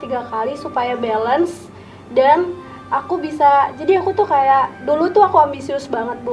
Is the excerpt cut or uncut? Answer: uncut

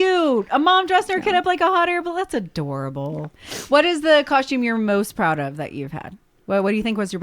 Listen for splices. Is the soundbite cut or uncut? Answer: cut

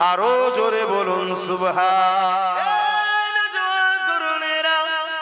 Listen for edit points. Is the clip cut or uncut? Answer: cut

